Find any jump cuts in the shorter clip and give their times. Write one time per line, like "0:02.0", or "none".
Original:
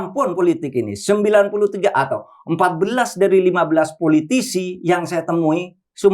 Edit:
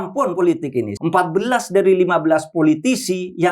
0:00.9